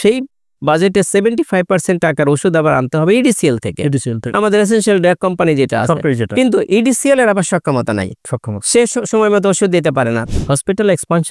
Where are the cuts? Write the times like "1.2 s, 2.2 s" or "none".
10.2 s